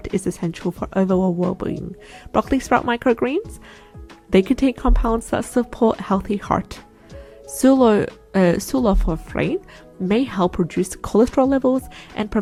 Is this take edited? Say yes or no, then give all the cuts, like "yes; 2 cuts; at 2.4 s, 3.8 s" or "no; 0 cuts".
no; 0 cuts